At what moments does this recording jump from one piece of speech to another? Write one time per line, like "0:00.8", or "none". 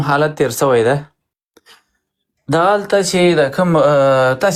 none